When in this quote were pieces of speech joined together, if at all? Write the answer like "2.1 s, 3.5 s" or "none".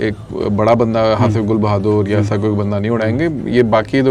none